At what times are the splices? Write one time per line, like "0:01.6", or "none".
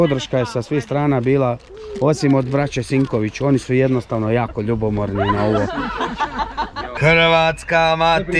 0:06.9

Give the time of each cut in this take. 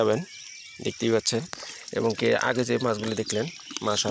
none

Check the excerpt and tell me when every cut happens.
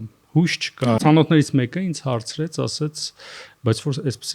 0:01.0

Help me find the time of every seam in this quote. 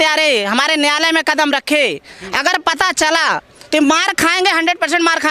none

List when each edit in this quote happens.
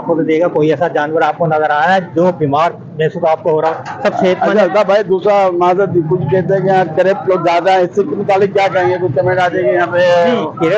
none

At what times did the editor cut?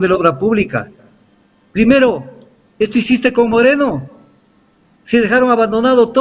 none

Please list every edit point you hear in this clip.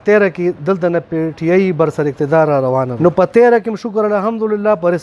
0:02.9

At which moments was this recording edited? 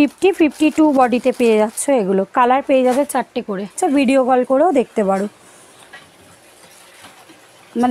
0:03.6

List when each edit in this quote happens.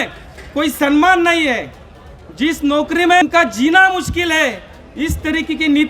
0:03.2

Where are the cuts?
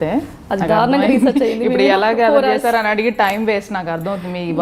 none

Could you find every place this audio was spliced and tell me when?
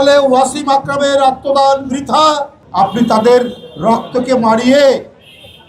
0:02.6

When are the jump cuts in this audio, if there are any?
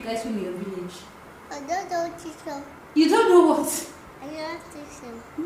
none

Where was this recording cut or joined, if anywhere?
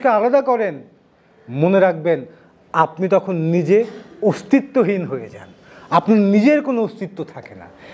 none

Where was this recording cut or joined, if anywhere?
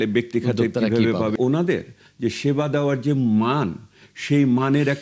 0:01.3

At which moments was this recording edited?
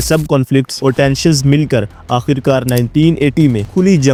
none

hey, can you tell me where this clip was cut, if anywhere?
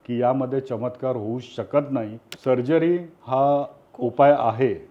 0:02.2
0:03.1

